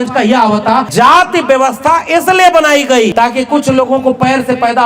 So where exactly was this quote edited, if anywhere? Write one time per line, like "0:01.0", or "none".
0:00.9
0:03.1